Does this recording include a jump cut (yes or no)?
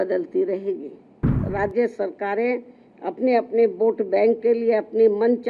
yes